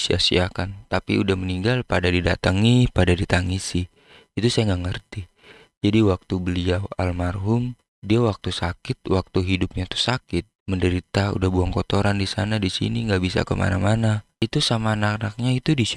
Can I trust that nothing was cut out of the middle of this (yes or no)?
yes